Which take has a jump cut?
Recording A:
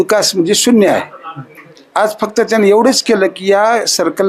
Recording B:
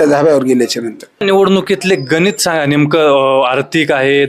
B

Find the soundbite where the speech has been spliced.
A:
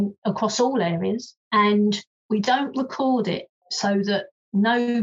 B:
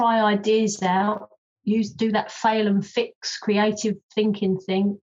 A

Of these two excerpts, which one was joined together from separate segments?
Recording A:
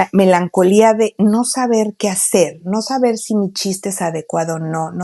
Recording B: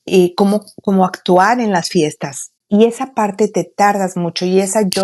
B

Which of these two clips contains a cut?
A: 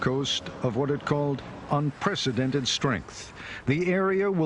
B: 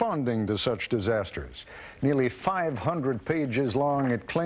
B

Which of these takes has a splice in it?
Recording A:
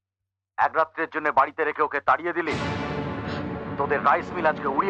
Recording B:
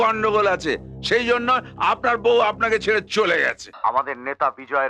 B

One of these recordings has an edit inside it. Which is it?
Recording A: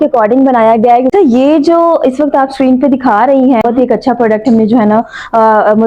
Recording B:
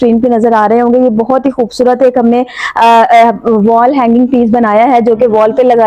A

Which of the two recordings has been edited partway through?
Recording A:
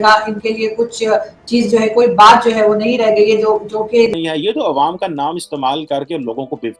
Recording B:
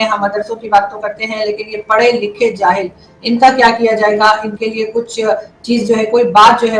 A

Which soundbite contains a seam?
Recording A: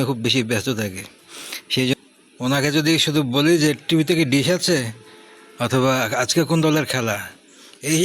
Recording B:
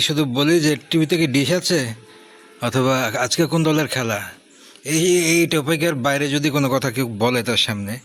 A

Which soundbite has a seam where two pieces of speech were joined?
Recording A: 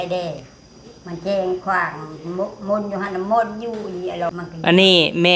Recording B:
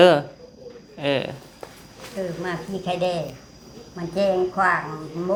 A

